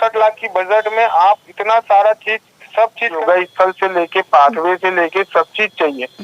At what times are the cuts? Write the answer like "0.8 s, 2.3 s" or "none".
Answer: 3.2 s